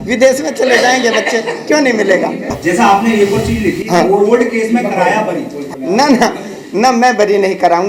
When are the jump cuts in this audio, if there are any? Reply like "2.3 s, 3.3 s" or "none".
2.4 s, 5.7 s